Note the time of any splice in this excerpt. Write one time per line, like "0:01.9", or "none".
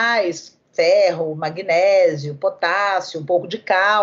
none